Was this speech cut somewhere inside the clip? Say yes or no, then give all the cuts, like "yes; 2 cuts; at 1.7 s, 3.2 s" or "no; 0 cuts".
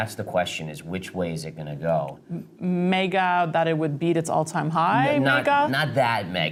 no; 0 cuts